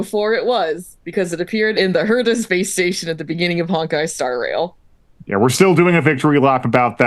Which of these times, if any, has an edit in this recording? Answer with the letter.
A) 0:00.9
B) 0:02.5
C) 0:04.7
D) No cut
B